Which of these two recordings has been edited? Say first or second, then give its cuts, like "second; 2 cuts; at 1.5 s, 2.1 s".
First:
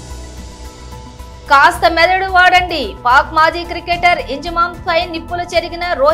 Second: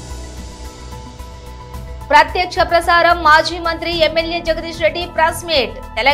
first; 1 cut; at 1.4 s